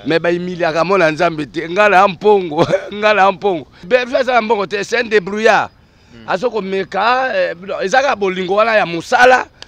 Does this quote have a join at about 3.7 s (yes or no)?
yes